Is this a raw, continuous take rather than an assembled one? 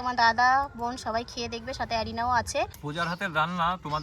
no; 1 cut; at 2.8 s

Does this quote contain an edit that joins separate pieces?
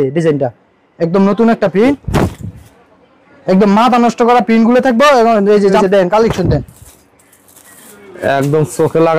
yes; 2 cuts; at 2.0 s, 5.8 s

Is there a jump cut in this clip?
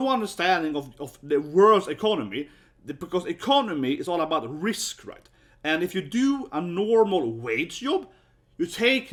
no; 0 cuts

